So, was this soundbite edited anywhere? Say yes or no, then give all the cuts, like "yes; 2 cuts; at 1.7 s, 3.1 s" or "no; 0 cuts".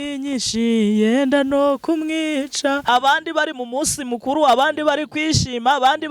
yes; 1 cut; at 2.8 s